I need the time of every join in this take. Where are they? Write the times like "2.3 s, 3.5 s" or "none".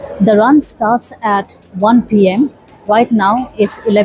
none